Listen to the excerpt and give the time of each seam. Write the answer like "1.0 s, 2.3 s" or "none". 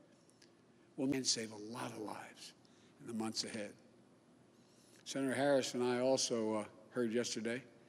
1.1 s